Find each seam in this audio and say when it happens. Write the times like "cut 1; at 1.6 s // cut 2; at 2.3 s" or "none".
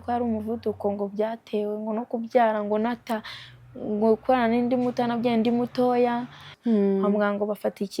cut 1; at 6.5 s